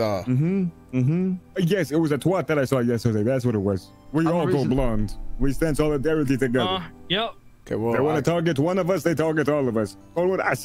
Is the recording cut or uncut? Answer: cut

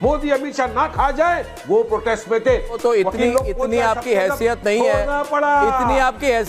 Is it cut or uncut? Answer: cut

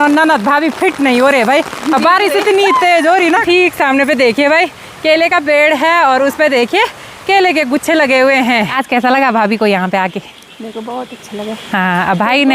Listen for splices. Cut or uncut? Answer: cut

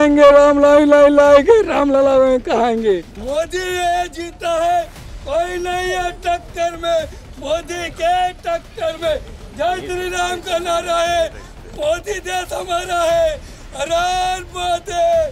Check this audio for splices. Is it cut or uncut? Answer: uncut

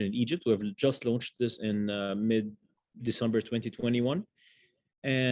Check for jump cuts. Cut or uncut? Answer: uncut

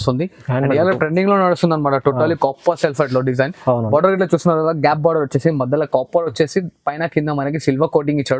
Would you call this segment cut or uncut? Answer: uncut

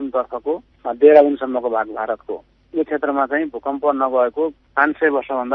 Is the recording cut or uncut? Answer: uncut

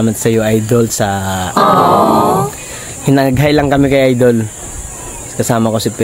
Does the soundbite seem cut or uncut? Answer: cut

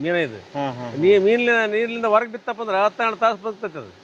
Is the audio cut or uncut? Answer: uncut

